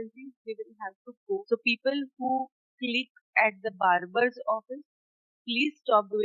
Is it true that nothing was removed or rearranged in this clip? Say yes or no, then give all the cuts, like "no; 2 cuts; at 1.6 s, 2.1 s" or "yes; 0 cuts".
no; 1 cut; at 1.4 s